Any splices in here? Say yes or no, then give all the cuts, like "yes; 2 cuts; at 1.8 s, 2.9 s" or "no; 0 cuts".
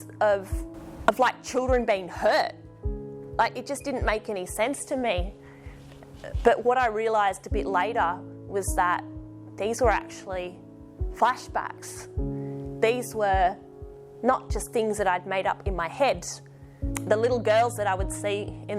yes; 1 cut; at 17.0 s